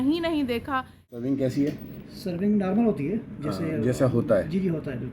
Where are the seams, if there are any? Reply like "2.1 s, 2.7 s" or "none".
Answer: 1.1 s